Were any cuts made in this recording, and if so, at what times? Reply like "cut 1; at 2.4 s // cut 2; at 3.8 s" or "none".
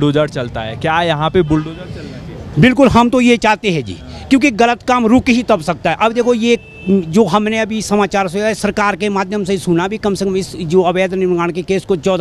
none